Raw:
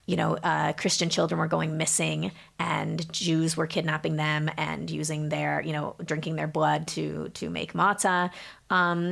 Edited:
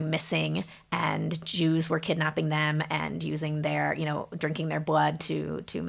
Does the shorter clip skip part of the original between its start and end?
no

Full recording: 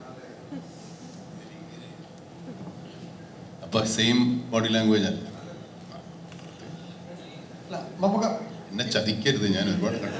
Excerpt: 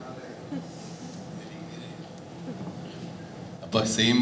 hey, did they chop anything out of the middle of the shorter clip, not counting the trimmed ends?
no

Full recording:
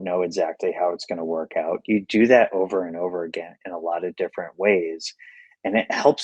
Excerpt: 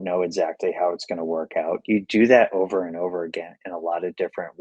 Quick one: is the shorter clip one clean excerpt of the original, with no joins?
yes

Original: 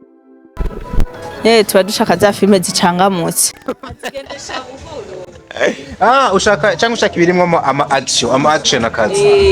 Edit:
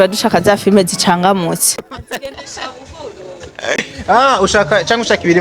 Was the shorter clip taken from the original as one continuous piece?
no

